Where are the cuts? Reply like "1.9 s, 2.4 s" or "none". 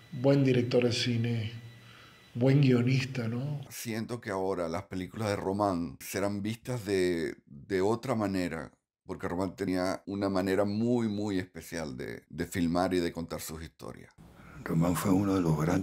3.7 s, 9.8 s, 14.0 s